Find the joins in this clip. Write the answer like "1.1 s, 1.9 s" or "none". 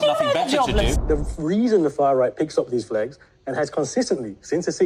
1.0 s